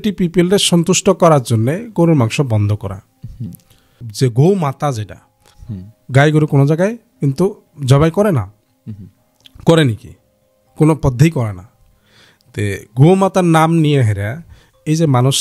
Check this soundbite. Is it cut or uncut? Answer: uncut